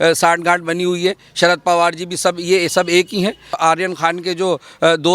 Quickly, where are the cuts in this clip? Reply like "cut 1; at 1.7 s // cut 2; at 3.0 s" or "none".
cut 1; at 3.6 s